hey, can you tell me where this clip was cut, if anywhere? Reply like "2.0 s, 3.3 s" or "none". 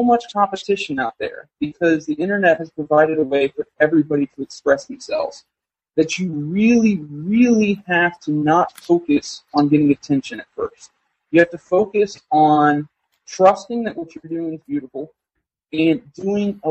none